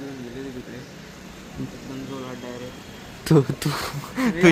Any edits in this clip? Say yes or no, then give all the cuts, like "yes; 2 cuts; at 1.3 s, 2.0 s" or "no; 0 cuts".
no; 0 cuts